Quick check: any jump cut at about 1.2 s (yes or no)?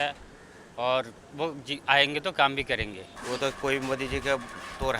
no